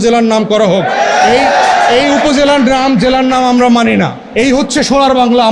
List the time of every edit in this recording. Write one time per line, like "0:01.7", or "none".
0:04.2